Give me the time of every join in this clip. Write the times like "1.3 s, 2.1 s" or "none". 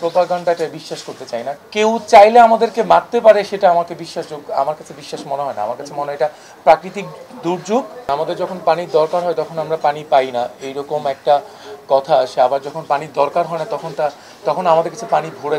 1.5 s, 8.1 s

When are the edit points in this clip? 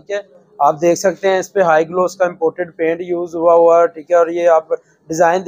none

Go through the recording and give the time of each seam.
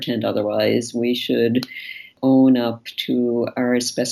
2.1 s

